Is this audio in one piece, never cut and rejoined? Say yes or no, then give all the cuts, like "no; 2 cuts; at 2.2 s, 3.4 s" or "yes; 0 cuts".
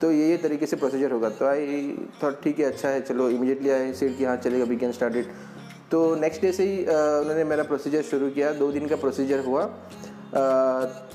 yes; 0 cuts